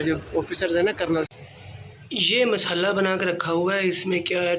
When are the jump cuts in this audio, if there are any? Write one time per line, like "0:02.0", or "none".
0:01.3